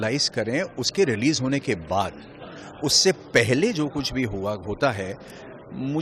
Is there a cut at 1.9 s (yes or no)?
no